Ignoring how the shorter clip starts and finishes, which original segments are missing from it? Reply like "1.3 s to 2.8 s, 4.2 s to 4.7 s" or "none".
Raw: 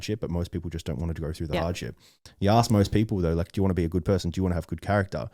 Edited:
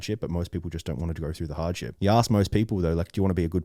1.9 s to 2.3 s